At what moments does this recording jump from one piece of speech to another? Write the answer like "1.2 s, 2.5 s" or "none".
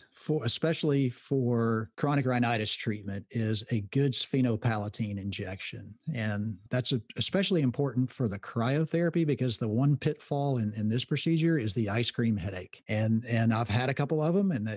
1.9 s, 12.7 s

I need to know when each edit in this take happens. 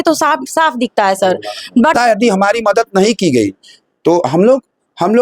1.9 s

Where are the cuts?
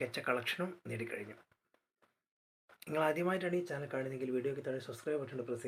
1.6 s

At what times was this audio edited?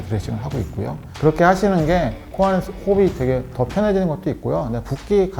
1.1 s

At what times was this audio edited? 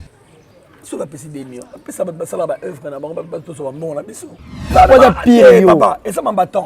4.6 s

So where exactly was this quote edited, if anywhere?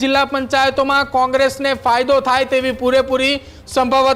none

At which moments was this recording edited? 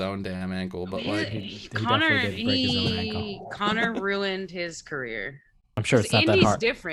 5.8 s

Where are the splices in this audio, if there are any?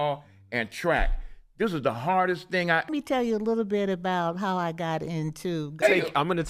2.9 s, 5.8 s

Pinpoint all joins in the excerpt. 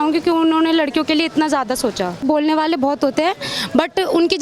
2.2 s

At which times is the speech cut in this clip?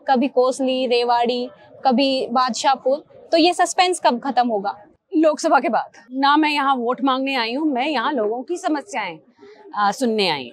6.0 s

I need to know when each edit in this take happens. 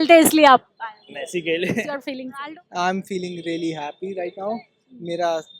2.2 s

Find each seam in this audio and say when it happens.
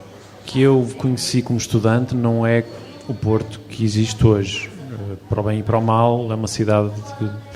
none

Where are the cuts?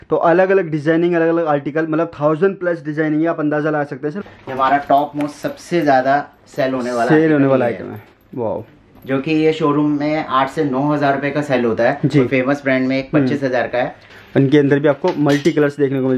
4.2 s, 14.0 s

